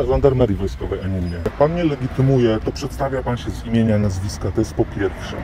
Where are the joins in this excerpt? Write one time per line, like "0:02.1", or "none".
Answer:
0:01.5